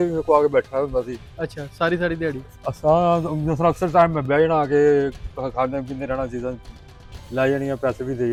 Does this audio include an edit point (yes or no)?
no